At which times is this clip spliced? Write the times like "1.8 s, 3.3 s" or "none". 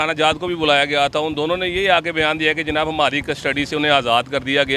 none